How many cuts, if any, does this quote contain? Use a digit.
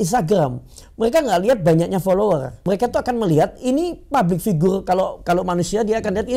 1